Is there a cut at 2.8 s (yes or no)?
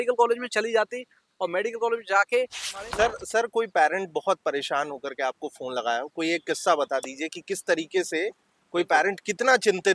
yes